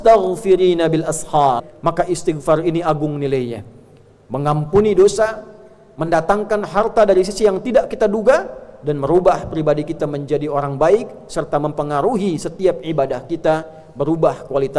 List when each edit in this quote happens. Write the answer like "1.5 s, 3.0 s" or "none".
1.7 s